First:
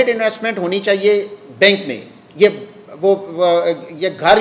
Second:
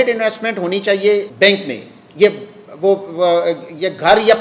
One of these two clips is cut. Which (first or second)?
second